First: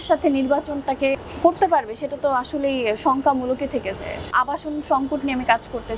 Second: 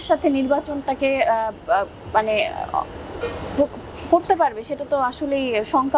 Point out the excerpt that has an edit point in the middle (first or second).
first